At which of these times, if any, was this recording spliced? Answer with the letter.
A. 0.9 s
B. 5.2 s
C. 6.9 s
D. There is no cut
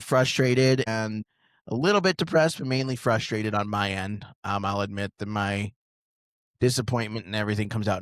A